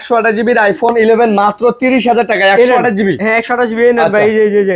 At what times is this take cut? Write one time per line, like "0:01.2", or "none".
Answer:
0:03.2